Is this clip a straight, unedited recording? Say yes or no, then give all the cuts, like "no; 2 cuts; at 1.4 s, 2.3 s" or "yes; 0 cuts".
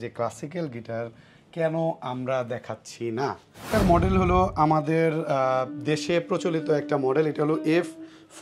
no; 1 cut; at 3.7 s